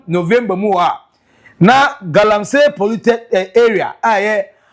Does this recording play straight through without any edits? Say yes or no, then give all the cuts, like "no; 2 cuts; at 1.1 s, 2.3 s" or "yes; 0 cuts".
yes; 0 cuts